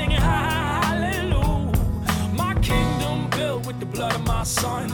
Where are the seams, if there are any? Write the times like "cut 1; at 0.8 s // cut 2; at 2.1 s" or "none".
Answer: none